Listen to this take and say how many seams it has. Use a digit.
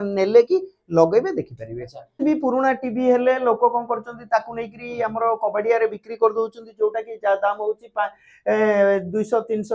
1